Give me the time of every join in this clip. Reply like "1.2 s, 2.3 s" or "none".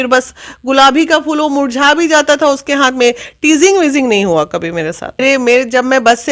5.2 s